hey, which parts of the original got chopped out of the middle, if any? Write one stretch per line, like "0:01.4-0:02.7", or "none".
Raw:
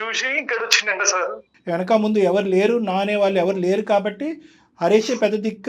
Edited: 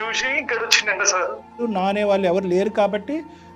0:01.6-0:02.8